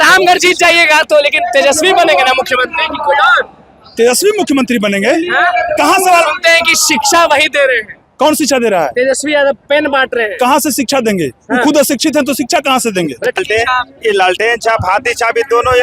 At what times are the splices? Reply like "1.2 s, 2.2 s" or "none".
13.4 s